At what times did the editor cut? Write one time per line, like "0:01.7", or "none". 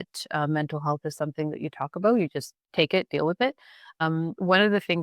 0:02.6
0:04.0